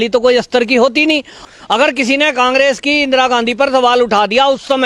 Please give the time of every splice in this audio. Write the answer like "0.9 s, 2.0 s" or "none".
1.4 s